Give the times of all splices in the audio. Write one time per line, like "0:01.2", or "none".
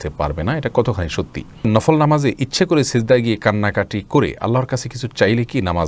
0:01.8